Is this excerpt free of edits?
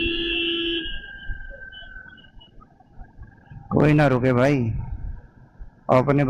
yes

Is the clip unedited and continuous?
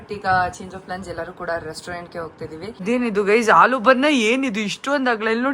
no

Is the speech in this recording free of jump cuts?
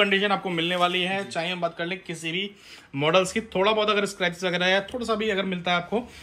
yes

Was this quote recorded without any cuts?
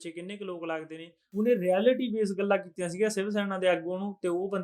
no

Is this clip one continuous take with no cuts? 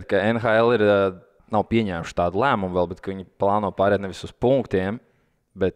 no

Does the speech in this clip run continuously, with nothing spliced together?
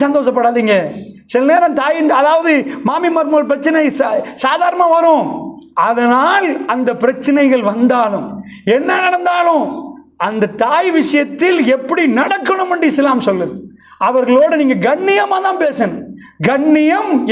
no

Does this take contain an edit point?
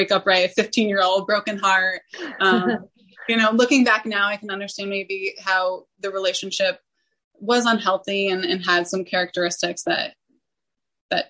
no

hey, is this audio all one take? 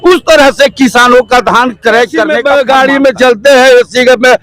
no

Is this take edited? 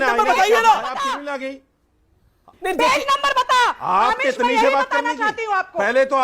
yes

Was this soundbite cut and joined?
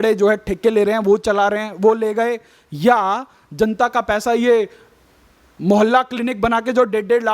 no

